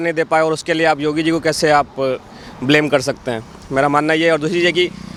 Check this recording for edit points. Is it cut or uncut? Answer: uncut